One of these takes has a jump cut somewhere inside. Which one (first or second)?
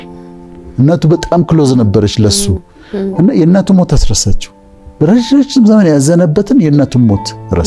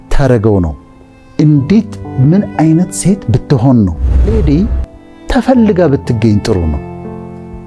second